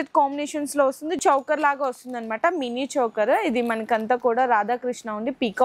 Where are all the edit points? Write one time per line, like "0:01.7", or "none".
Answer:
0:01.2